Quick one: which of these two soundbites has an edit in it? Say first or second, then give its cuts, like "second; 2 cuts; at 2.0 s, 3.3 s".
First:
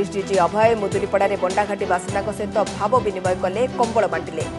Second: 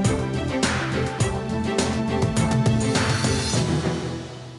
second; 1 cut; at 1.1 s